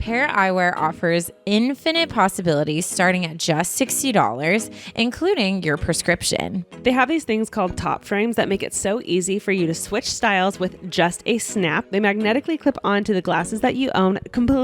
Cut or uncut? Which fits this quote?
cut